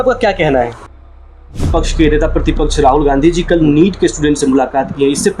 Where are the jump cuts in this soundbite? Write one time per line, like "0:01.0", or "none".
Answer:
0:01.4